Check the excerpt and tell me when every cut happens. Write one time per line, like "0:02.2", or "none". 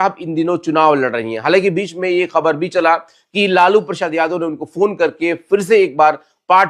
none